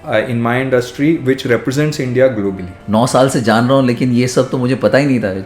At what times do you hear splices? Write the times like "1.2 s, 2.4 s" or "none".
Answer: 2.7 s

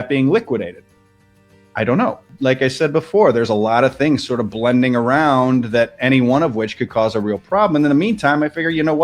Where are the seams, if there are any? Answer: 2.3 s

